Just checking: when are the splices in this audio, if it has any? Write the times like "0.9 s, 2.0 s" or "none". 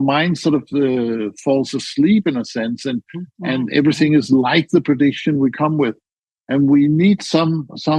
none